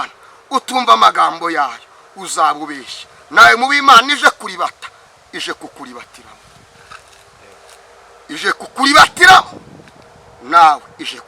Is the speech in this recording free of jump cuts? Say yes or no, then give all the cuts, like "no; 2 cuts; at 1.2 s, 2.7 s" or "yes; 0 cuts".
yes; 0 cuts